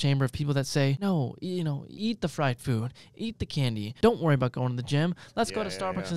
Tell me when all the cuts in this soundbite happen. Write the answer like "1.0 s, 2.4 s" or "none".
1.0 s, 1.9 s, 3.9 s